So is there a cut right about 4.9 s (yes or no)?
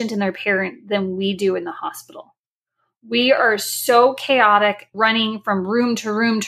yes